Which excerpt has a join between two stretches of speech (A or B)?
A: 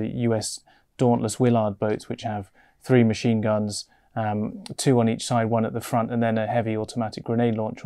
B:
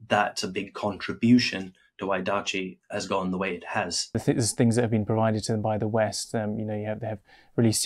B